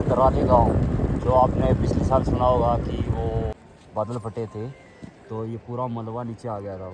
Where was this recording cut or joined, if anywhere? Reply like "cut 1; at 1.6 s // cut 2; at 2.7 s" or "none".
cut 1; at 3.5 s